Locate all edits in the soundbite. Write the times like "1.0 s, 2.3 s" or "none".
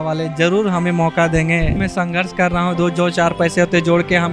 1.8 s